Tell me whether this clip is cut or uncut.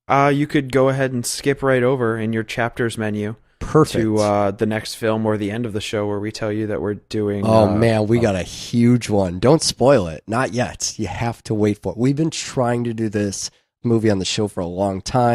cut